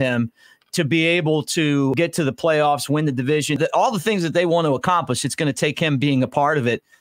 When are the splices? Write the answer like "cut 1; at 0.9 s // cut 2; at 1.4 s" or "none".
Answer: cut 1; at 2.0 s // cut 2; at 3.6 s

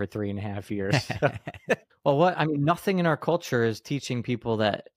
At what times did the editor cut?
cut 1; at 1.9 s

